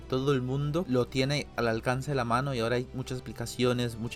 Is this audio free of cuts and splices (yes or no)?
yes